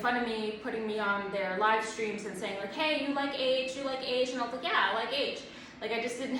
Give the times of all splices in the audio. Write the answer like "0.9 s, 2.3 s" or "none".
none